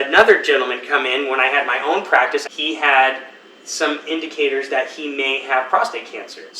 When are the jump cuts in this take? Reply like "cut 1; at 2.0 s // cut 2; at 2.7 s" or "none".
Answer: cut 1; at 2.4 s